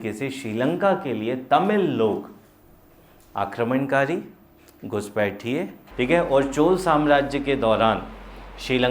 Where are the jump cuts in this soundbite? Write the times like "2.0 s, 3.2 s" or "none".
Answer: 5.8 s